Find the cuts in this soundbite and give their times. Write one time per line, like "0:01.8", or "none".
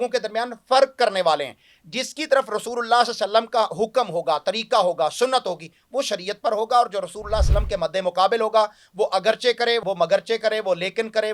none

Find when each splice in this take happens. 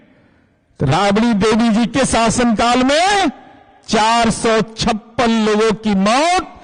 none

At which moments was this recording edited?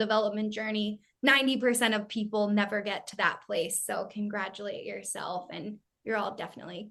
none

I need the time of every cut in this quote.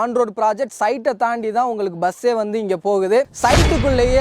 0:03.2

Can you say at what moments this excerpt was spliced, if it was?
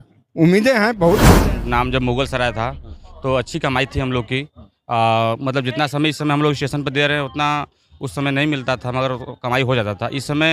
0:01.4

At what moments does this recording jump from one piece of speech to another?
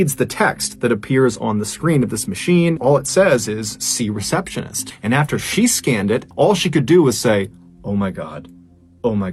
0:02.8
0:04.9
0:06.3

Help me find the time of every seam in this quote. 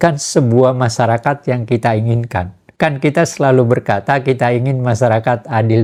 none

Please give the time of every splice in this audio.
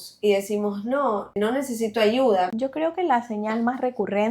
0:01.4
0:02.5

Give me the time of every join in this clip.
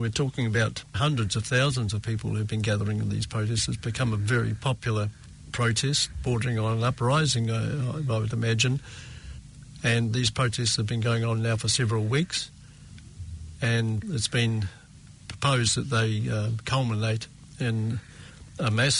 0:00.9

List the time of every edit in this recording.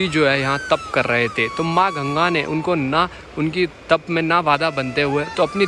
none

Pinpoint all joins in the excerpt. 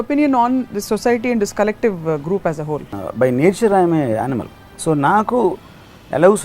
0:03.0

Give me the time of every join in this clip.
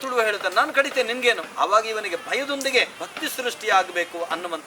0:01.5
0:03.0

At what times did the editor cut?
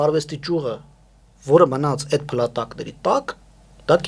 none

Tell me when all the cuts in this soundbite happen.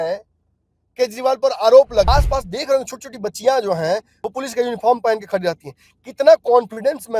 0:02.1

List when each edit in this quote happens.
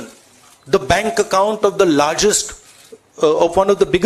none

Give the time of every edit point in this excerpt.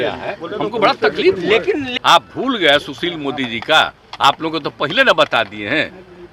0:01.9

